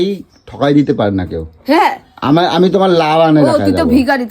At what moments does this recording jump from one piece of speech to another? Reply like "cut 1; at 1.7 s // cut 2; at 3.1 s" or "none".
none